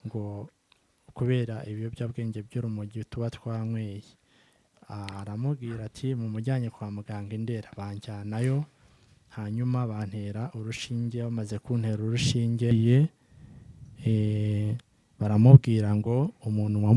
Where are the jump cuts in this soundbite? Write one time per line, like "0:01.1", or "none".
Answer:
0:12.7